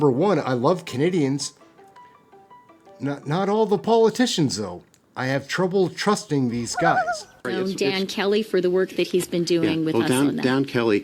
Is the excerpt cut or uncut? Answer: cut